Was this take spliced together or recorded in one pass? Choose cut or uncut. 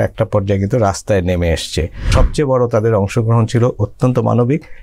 cut